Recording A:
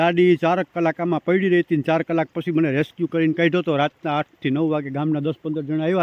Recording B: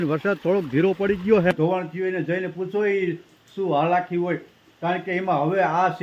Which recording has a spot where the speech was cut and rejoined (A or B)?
B